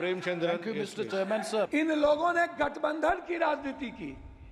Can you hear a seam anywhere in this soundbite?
yes; 1 cut; at 1.7 s

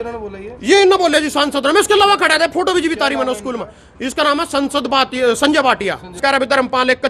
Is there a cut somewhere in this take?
yes; 1 cut; at 6.2 s

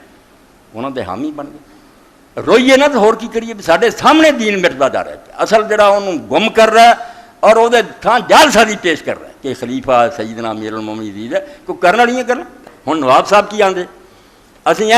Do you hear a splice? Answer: yes; 1 cut; at 12.6 s

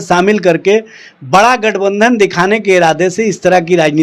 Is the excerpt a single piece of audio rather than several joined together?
yes; 0 cuts

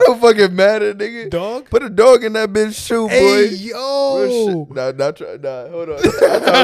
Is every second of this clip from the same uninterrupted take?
yes; 0 cuts

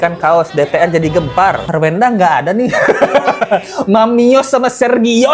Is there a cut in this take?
yes; 1 cut; at 1.6 s

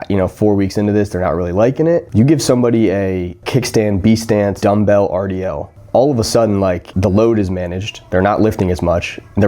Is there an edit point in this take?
yes; 4 cuts; at 2.1 s, 3.4 s, 4.6 s, 6.9 s

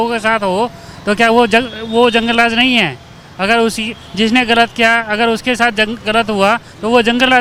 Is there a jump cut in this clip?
no; 0 cuts

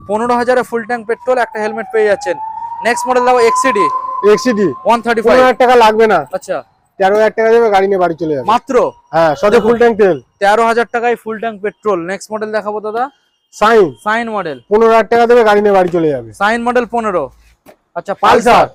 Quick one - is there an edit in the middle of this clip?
no; 0 cuts

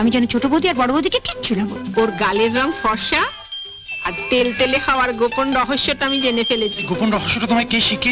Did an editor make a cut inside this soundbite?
yes; 1 cut; at 1.8 s

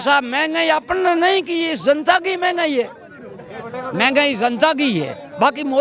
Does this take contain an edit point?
no; 0 cuts

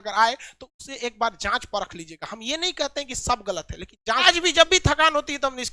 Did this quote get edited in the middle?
yes; 1 cut; at 4.3 s

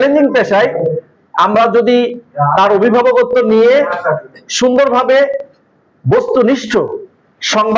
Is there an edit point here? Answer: no; 0 cuts

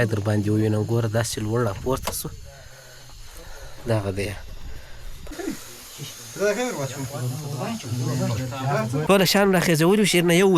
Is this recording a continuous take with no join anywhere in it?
no; 2 cuts; at 5.3 s, 9.0 s

